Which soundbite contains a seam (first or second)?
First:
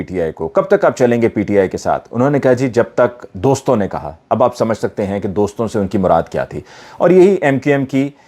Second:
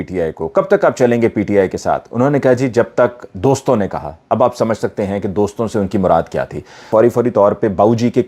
second